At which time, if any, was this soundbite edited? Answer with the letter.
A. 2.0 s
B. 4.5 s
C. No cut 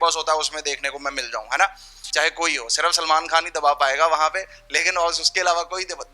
A